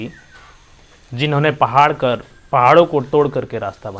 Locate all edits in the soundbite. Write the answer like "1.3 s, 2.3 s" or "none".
none